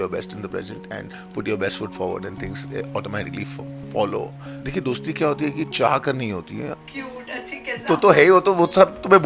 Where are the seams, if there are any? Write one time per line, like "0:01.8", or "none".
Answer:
0:04.5
0:06.8